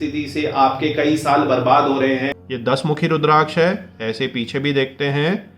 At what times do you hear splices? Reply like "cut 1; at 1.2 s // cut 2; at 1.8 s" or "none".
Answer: cut 1; at 2.4 s